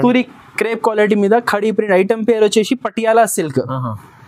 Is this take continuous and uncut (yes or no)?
yes